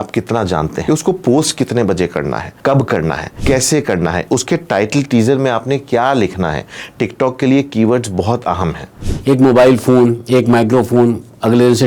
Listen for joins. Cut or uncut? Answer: cut